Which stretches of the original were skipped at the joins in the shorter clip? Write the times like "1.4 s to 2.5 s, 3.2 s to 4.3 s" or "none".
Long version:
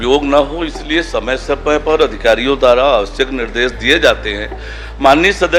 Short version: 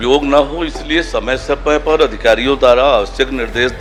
none